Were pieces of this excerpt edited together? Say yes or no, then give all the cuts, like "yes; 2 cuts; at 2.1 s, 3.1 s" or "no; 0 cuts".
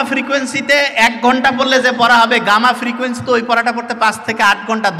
no; 0 cuts